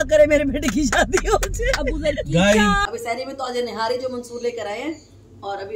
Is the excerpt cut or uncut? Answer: cut